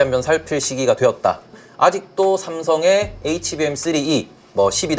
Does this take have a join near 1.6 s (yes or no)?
yes